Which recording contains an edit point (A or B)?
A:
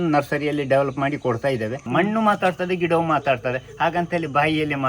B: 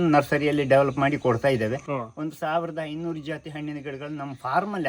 A